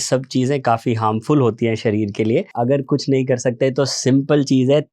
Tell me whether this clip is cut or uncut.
cut